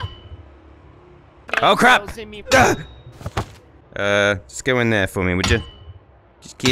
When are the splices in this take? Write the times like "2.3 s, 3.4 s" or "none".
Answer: 1.4 s